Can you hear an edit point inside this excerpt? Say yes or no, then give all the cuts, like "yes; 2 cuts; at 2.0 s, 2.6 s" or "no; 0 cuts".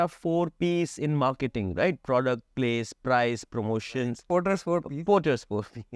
yes; 1 cut; at 4.2 s